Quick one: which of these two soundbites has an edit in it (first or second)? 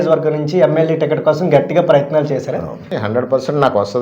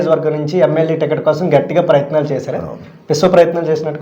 first